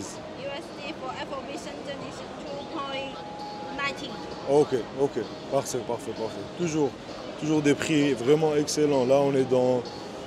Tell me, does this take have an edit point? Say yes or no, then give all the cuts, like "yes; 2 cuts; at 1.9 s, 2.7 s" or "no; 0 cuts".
no; 0 cuts